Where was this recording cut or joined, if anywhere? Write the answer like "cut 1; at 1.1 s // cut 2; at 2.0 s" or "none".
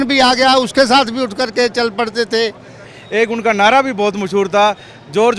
cut 1; at 2.9 s